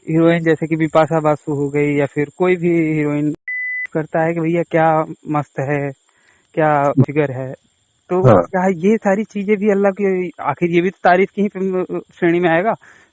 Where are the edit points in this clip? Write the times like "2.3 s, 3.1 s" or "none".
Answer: 3.5 s, 7.1 s